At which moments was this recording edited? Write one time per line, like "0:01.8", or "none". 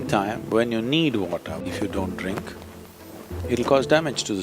0:01.6